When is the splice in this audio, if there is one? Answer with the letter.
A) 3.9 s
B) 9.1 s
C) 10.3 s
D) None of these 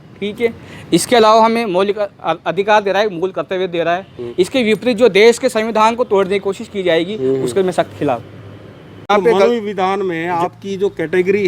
B